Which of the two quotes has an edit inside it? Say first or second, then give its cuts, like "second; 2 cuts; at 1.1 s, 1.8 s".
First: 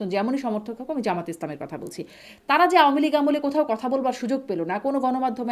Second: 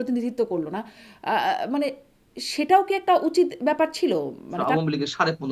second; 1 cut; at 4.6 s